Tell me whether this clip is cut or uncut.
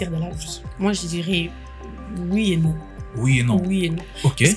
uncut